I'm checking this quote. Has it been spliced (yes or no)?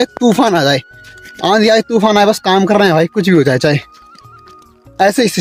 no